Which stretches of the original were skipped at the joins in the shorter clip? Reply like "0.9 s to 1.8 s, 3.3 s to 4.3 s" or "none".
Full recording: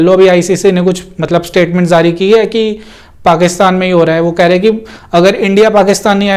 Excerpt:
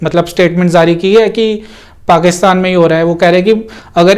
none

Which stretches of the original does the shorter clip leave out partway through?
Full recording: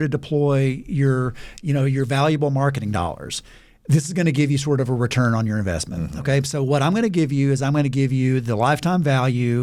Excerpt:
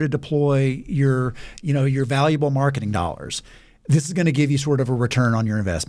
none

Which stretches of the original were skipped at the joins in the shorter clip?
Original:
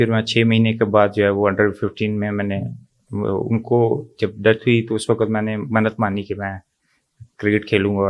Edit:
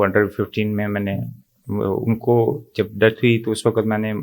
none

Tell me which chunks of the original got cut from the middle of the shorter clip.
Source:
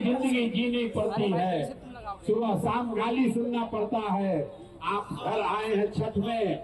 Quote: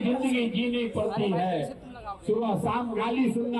none

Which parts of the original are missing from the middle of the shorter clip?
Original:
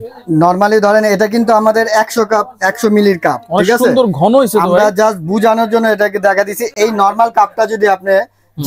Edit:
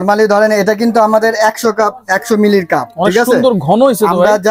none

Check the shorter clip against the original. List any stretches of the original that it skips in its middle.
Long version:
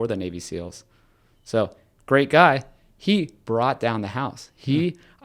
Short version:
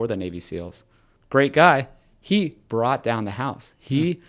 1.1 s to 1.9 s

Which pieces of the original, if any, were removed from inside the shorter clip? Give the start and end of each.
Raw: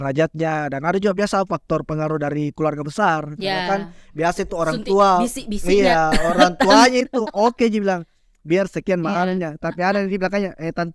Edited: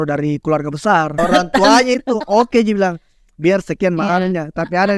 3.3 s to 6.2 s

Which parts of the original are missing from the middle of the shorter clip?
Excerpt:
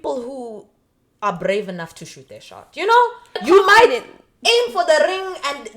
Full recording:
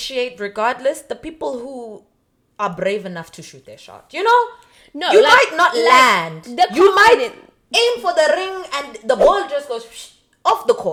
4.8 s to 6.7 s

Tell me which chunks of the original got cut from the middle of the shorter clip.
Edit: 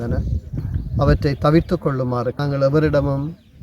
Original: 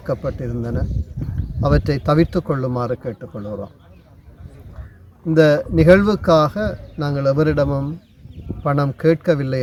3.0 s to 7.0 s

